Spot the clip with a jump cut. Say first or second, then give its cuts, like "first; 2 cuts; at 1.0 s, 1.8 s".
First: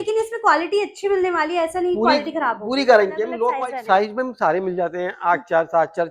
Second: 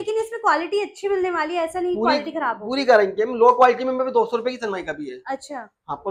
first; 1 cut; at 3.4 s